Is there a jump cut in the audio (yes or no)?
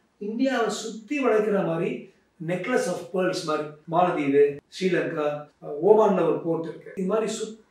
yes